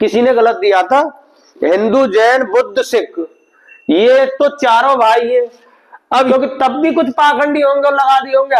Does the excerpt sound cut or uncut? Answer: cut